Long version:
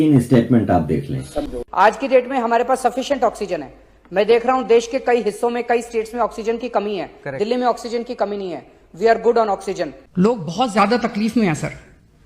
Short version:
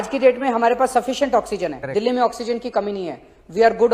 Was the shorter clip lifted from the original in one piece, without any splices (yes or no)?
no